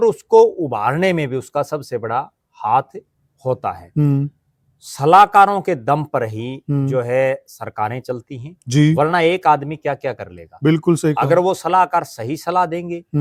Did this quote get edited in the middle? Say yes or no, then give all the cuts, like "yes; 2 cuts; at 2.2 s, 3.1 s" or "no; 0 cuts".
no; 0 cuts